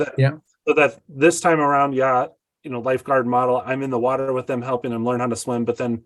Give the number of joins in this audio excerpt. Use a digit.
0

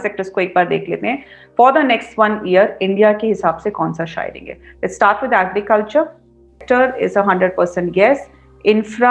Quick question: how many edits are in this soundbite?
1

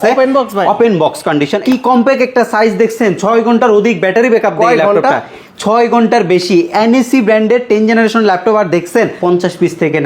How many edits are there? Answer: 2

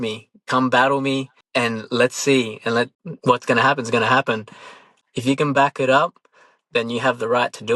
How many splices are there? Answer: 3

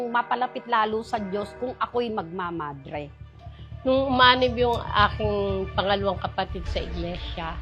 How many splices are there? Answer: 1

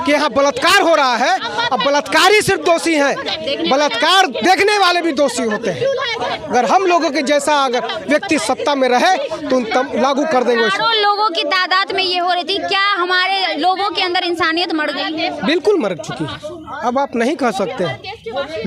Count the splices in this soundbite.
0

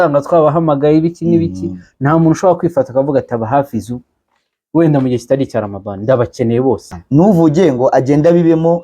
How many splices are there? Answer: 1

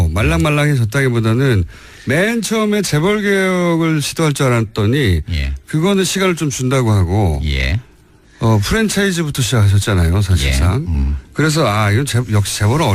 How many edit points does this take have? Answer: 0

